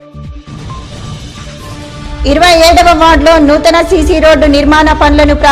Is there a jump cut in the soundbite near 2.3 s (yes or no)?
no